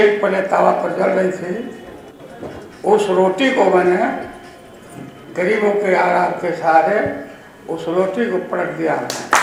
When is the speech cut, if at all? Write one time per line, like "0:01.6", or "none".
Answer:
none